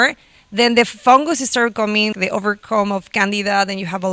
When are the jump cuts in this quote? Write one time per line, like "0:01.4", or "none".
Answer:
0:02.1